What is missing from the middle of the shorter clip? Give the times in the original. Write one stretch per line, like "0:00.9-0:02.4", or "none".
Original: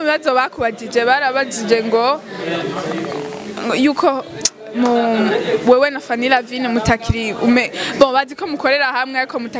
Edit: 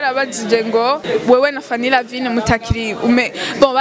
0:02.2-0:05.4